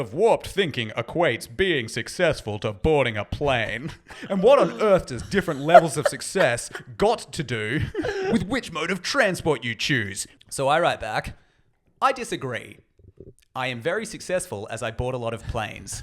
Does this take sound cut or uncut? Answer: cut